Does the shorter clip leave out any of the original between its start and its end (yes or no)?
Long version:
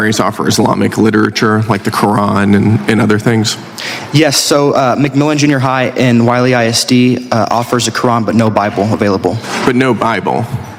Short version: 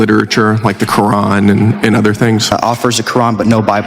yes